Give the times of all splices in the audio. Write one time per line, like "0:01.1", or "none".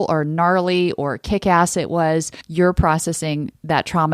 0:02.4